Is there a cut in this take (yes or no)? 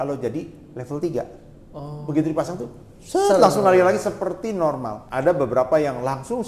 yes